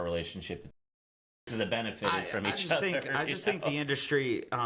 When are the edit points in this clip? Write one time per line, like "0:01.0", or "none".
0:01.1